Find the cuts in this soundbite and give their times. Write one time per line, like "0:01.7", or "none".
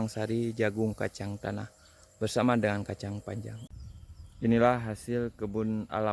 0:03.6